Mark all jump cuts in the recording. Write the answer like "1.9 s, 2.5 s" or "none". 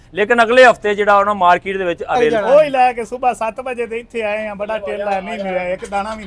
2.3 s